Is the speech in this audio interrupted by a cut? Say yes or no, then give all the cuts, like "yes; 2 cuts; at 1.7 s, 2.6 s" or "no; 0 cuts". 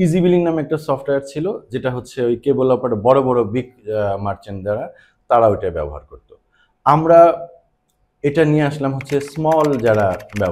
no; 0 cuts